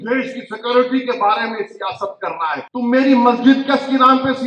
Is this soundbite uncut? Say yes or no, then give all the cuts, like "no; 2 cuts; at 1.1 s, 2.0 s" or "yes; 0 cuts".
no; 1 cut; at 2.7 s